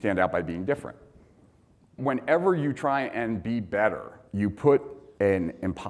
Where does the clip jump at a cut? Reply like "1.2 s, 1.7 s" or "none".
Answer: 1.9 s, 5.0 s